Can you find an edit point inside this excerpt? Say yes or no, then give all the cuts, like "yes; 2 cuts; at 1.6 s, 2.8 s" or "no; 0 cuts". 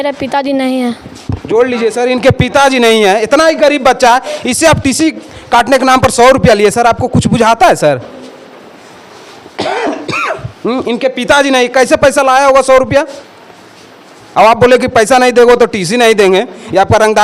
no; 0 cuts